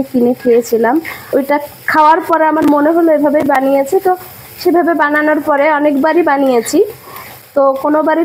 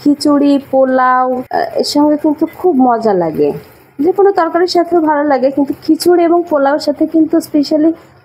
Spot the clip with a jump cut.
second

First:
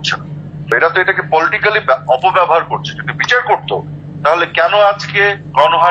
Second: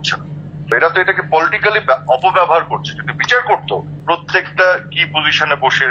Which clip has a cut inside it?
second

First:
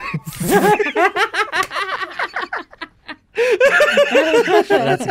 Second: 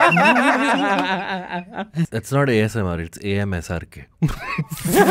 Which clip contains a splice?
second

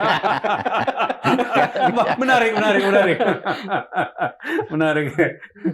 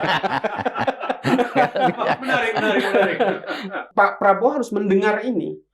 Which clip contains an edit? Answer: second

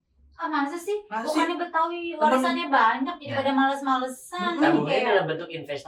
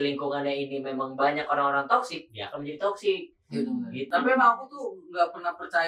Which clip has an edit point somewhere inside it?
second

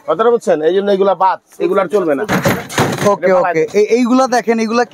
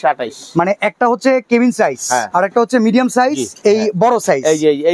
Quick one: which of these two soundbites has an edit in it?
second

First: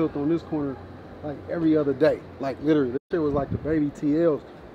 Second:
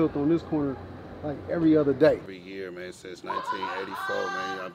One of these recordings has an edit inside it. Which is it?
second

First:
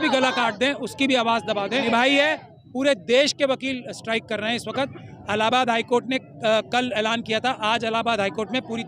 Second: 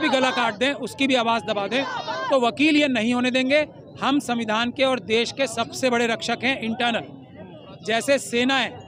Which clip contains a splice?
first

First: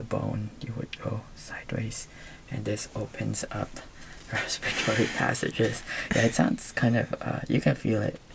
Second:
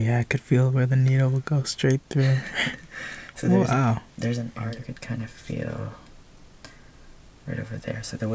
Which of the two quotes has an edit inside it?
second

